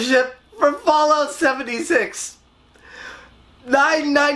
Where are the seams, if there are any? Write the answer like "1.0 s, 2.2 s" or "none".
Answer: none